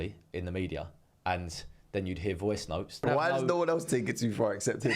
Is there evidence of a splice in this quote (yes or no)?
yes